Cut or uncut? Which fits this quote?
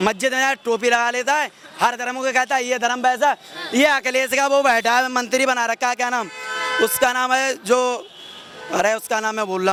uncut